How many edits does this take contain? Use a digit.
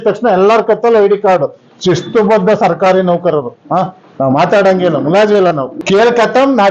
1